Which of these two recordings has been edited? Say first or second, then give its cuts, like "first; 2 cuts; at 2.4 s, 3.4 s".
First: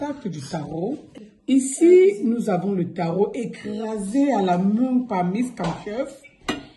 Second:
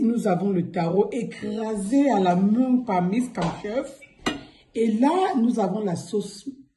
first; 1 cut; at 1.1 s